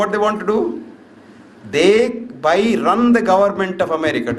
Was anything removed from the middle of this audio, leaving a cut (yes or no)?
no